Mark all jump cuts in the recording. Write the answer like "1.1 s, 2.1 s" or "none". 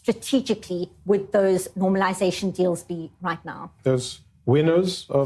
3.7 s